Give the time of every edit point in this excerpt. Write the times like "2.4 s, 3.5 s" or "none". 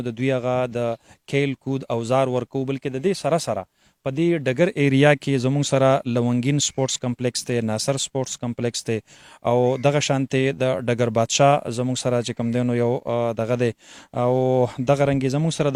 none